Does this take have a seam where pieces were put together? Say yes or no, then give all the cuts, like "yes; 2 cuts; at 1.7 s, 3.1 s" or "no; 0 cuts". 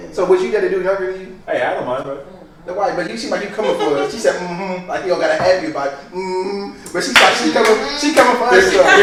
no; 0 cuts